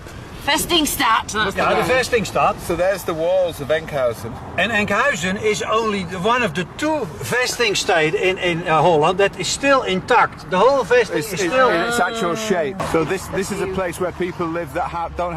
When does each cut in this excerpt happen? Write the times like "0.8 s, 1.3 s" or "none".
12.9 s